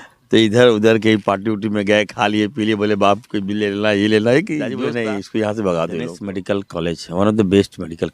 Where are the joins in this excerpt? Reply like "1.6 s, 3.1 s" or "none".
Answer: 4.8 s, 6.3 s